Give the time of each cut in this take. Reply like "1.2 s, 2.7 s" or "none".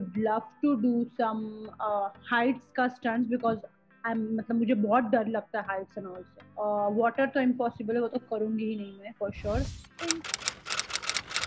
10.2 s